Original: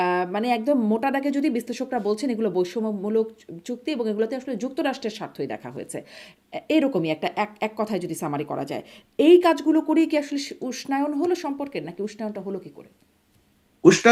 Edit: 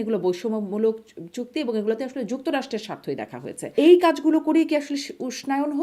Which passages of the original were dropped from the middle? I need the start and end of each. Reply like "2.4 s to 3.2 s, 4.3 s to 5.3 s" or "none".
5.9 s to 9.0 s